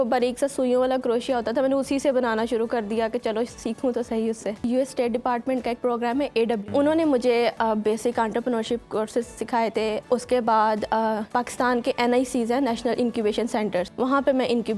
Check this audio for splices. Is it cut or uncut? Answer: cut